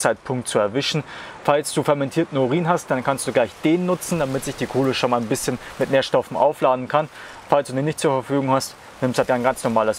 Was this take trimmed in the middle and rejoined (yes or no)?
no